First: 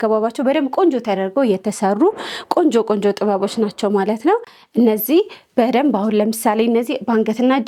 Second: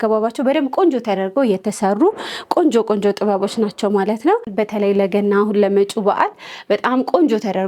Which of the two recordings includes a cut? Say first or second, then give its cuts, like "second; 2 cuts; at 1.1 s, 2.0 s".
second; 1 cut; at 4.5 s